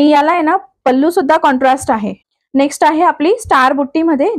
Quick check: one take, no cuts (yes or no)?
no